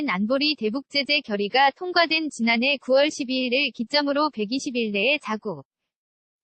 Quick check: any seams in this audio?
no; 0 cuts

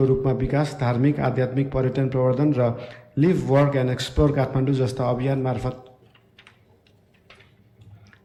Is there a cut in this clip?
no; 0 cuts

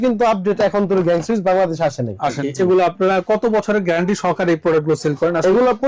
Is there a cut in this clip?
yes; 1 cut; at 2.4 s

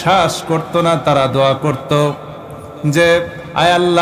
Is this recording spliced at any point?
no; 0 cuts

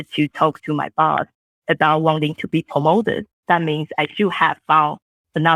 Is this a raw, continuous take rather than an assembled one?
yes; 0 cuts

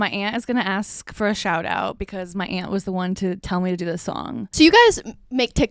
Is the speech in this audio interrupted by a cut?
yes; 1 cut; at 4.5 s

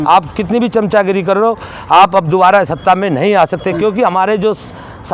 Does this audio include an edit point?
no; 0 cuts

